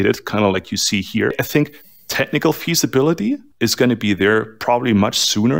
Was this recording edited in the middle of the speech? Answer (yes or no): yes